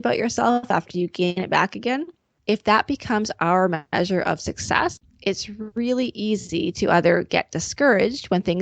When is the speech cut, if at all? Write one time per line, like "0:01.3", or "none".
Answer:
0:02.3
0:03.8
0:05.1